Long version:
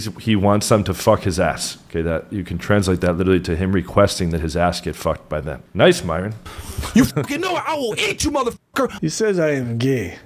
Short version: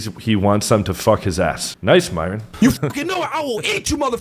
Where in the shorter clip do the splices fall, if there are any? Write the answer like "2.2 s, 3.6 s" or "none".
1.7 s, 2.4 s